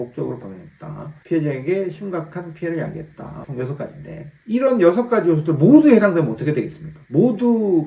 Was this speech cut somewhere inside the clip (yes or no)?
yes